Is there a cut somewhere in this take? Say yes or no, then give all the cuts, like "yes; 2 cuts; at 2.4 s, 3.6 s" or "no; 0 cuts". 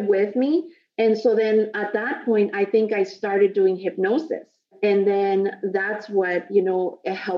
no; 0 cuts